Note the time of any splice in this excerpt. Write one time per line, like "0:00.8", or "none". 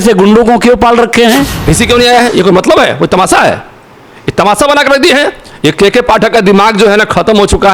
0:01.6